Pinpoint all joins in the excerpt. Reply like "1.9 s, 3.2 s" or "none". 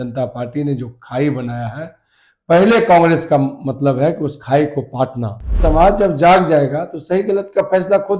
5.5 s